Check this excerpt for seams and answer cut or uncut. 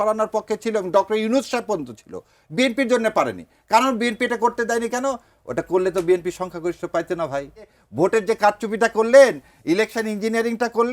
cut